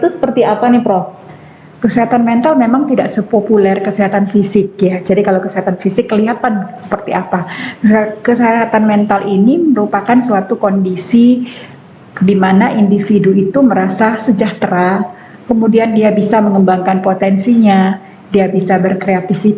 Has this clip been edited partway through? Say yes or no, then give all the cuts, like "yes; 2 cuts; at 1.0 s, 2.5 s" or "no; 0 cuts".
no; 0 cuts